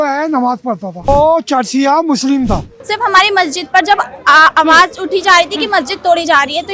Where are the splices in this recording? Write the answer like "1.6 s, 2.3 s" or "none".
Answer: 1.1 s, 2.7 s